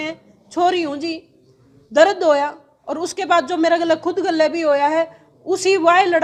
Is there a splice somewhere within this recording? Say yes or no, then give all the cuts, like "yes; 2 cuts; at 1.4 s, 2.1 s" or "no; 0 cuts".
no; 0 cuts